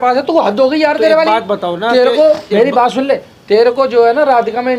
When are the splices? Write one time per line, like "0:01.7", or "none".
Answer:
none